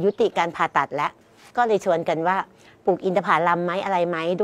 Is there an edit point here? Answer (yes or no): yes